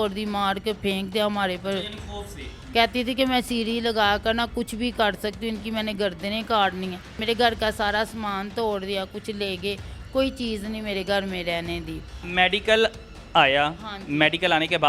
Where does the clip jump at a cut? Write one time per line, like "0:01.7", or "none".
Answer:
0:02.5
0:07.2
0:12.2